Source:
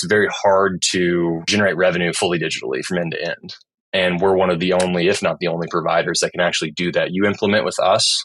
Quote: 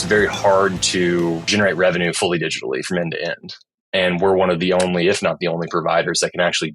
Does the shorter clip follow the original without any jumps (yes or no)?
yes